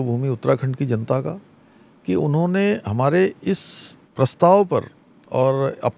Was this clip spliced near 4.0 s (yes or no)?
yes